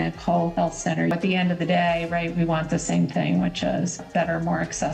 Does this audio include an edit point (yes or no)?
yes